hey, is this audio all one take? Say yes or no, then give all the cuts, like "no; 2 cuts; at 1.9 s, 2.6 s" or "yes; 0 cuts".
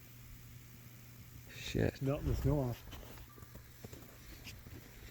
no; 1 cut; at 2.0 s